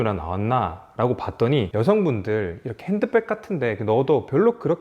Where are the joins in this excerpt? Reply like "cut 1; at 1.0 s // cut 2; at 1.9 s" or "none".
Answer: cut 1; at 1.7 s